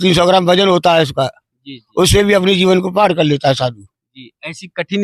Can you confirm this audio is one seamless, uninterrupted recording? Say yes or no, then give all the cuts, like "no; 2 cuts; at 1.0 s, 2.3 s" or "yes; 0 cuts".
yes; 0 cuts